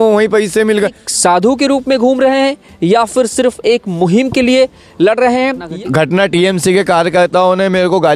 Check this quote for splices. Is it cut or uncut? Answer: cut